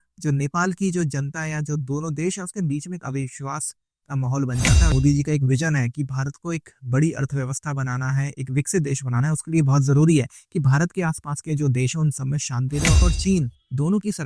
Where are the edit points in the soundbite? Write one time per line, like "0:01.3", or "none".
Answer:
0:04.9
0:13.0